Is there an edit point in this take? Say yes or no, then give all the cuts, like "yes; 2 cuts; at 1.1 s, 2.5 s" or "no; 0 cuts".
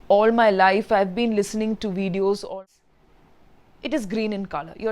yes; 1 cut; at 2.5 s